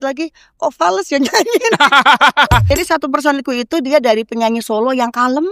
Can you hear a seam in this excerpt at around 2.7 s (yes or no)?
yes